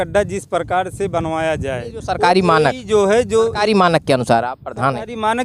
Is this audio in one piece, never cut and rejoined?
yes; 0 cuts

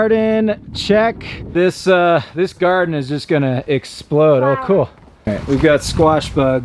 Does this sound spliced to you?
yes; 2 cuts; at 1.5 s, 5.3 s

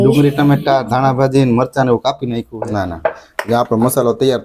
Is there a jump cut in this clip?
yes; 1 cut; at 2.4 s

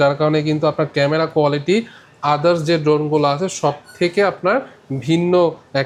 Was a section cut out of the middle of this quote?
no; 0 cuts

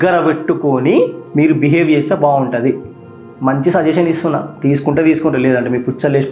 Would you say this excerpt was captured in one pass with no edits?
yes; 0 cuts

